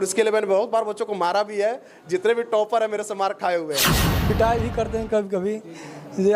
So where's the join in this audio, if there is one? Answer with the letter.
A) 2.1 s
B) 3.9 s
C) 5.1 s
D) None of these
B